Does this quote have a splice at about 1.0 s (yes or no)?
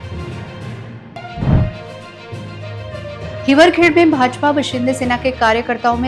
yes